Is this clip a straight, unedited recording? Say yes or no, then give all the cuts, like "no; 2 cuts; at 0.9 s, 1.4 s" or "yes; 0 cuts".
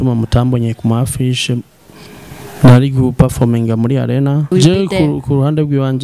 no; 1 cut; at 4.5 s